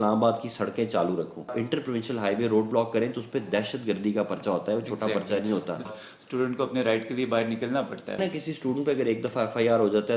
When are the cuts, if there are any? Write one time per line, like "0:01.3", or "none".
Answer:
0:01.6
0:05.9
0:08.2

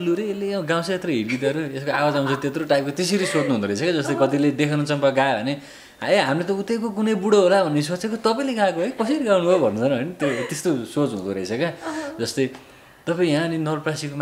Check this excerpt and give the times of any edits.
none

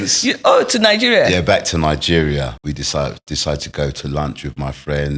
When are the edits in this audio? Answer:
0:02.5

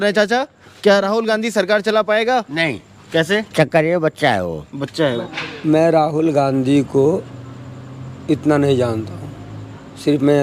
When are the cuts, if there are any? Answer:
0:05.3

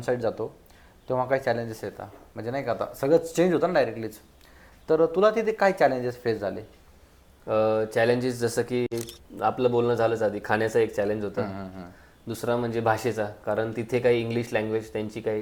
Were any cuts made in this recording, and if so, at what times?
none

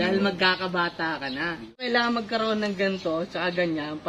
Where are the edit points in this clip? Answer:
0:01.9

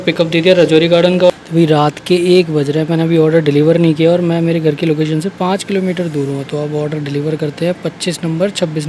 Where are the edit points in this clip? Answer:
0:01.3

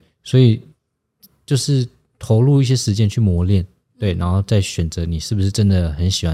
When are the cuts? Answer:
none

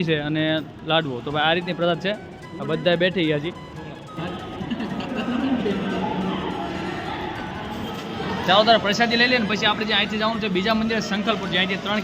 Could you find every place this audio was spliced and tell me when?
none

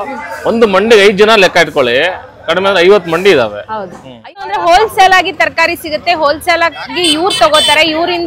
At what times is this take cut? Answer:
0:04.2

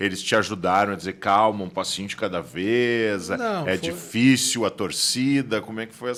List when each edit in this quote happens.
none

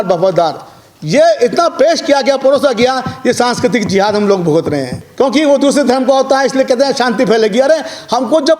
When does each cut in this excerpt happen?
0:05.0

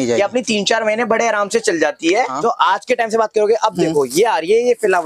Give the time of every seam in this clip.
0:02.3

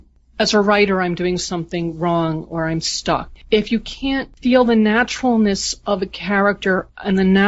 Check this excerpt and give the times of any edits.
0:03.3

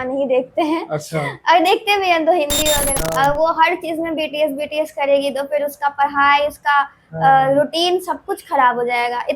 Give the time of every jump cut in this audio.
0:02.9

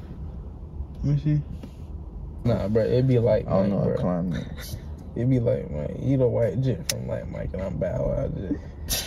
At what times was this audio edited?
0:02.4

